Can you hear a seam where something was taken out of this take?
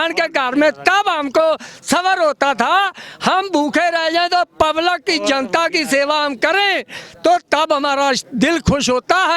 no; 0 cuts

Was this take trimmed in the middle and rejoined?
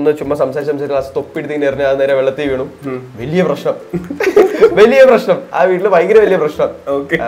no; 0 cuts

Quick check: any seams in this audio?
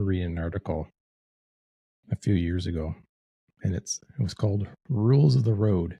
no; 0 cuts

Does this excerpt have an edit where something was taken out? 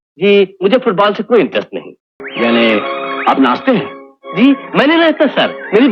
no; 0 cuts

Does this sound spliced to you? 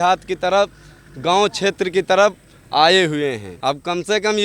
yes; 1 cut; at 3.5 s

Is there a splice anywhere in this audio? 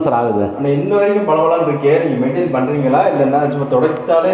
no; 0 cuts

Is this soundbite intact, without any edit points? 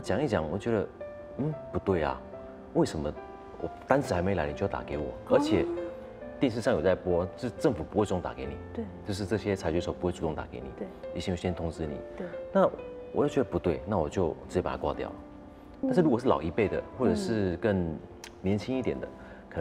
no; 1 cut; at 15.8 s

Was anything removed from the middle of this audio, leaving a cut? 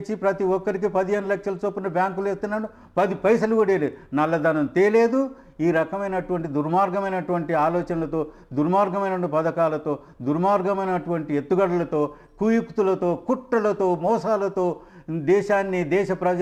no; 0 cuts

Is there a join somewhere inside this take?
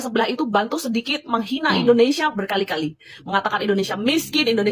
no; 0 cuts

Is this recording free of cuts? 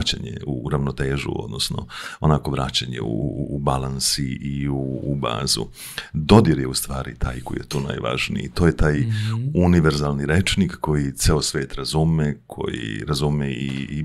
yes; 0 cuts

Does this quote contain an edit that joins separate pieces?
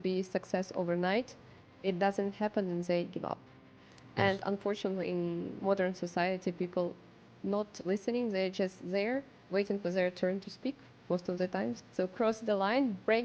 yes; 2 cuts; at 3.6 s, 11.8 s

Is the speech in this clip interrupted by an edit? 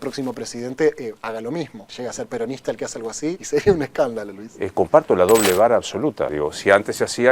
yes; 3 cuts; at 1.8 s, 3.4 s, 6.3 s

